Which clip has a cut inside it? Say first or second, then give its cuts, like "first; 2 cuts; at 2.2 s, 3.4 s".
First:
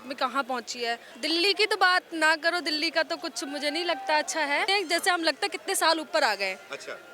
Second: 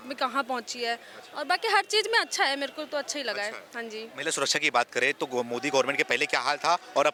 first; 2 cuts; at 1.1 s, 4.7 s